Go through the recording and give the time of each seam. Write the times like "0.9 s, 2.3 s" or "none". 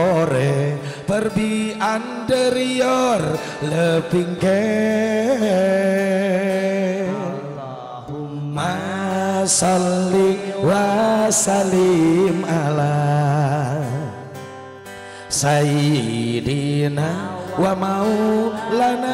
none